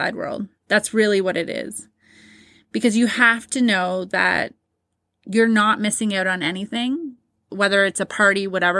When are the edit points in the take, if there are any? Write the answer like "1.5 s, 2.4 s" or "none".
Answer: 7.5 s